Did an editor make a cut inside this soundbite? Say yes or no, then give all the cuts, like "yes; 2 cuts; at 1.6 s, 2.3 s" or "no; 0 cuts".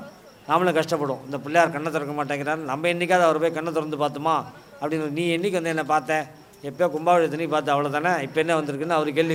no; 0 cuts